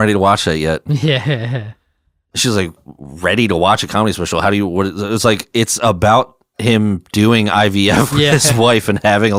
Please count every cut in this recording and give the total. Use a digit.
0